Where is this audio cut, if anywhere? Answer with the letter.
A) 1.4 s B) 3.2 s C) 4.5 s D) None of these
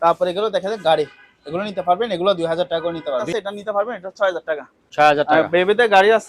B